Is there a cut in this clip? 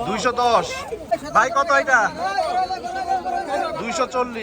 yes; 1 cut; at 1.1 s

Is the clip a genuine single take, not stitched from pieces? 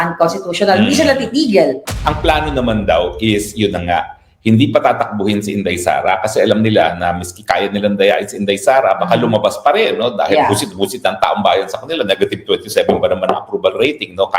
no; 1 cut; at 1.9 s

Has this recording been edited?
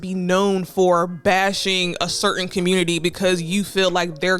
no; 0 cuts

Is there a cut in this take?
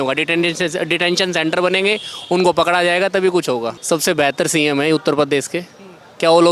yes; 1 cut; at 3.7 s

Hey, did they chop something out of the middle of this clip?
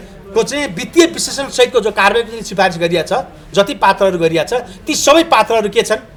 no; 0 cuts

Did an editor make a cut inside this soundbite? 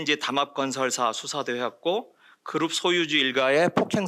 no; 0 cuts

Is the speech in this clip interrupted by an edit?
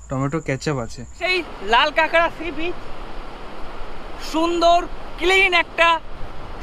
yes; 1 cut; at 1.2 s

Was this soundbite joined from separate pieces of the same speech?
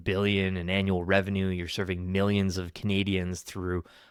no; 0 cuts

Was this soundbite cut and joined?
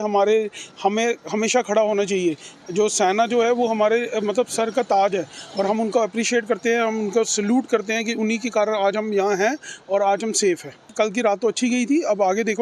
yes; 1 cut; at 10.9 s

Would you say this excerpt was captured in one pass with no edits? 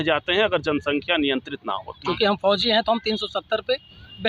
no; 1 cut; at 2.0 s

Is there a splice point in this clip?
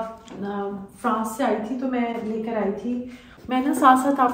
yes; 1 cut; at 3.3 s

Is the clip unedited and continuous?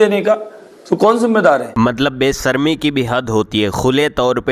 yes; 0 cuts

